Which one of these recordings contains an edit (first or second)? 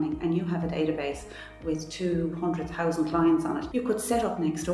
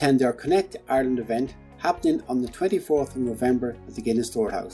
first